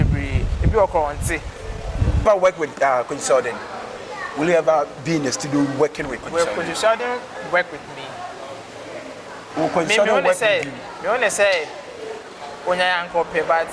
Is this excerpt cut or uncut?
cut